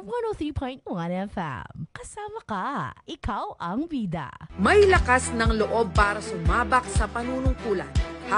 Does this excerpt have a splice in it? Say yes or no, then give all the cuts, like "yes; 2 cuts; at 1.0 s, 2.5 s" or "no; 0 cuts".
yes; 1 cut; at 4.4 s